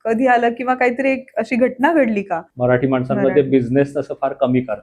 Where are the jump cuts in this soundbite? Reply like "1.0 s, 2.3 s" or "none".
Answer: 2.4 s